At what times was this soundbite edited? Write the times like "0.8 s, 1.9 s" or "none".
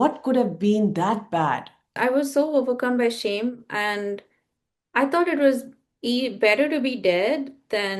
1.9 s